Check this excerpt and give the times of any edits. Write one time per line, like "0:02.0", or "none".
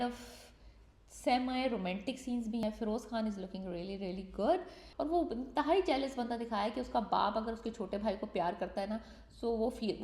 0:04.8